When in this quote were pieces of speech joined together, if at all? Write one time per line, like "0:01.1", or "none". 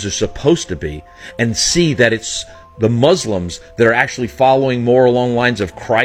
none